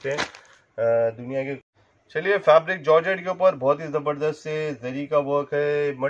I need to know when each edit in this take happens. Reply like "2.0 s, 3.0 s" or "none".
1.6 s